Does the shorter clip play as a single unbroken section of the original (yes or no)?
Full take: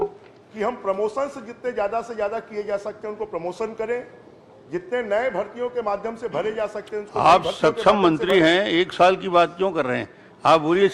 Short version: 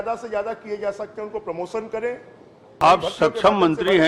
no